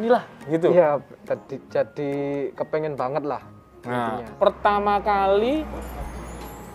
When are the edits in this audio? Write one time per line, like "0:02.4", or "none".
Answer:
0:04.3